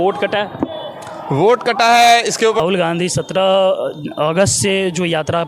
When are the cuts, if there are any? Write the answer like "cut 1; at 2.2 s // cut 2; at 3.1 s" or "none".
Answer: cut 1; at 2.6 s